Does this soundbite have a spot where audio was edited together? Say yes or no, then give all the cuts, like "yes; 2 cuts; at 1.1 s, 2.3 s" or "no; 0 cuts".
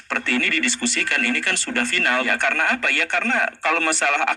yes; 1 cut; at 2.3 s